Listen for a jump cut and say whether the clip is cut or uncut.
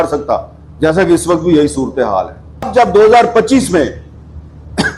cut